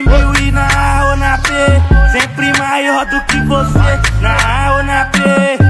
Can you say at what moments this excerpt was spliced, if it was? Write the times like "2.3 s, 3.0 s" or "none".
none